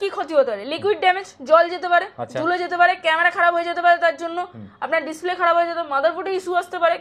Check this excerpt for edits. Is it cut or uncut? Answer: uncut